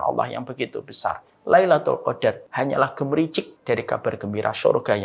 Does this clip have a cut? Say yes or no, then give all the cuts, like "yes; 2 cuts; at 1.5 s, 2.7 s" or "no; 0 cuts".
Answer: yes; 3 cuts; at 1.3 s, 2.5 s, 3.5 s